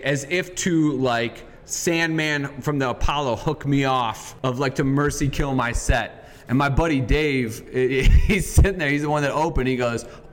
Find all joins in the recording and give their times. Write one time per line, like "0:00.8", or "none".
none